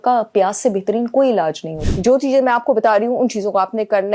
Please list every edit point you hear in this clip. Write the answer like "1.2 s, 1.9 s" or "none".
1.7 s